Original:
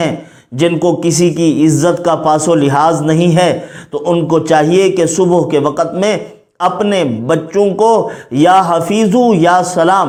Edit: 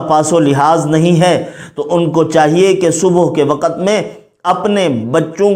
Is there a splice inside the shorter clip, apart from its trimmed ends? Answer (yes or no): no